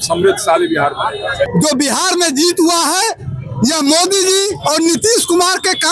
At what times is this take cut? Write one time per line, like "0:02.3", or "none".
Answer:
0:01.5